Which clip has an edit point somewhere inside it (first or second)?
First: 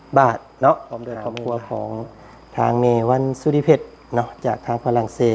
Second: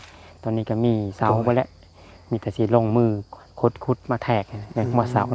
first